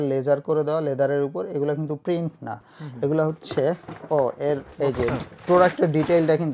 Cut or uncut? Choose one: uncut